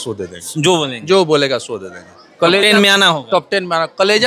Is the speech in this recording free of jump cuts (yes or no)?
yes